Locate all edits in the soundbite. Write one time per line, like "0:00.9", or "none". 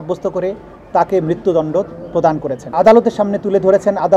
0:02.6